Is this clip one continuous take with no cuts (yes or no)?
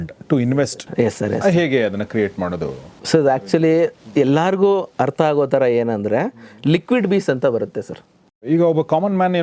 no